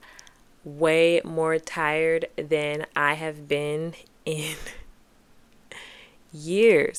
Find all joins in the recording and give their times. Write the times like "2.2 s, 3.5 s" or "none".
none